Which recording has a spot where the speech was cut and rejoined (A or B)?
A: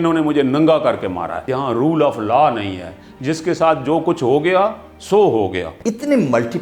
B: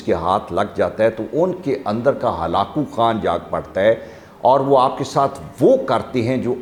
A